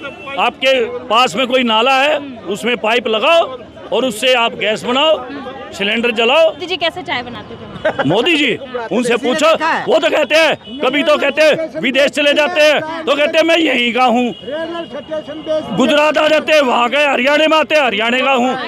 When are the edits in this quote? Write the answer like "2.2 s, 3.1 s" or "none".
6.7 s